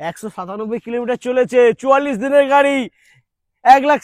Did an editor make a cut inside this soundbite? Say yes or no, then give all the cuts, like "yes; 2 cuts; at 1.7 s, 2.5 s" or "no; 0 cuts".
no; 0 cuts